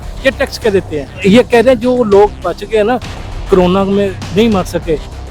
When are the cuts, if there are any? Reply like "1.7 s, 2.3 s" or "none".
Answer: 1.0 s